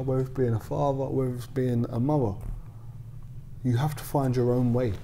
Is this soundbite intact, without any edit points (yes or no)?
yes